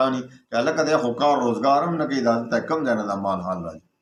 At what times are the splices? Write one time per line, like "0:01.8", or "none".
none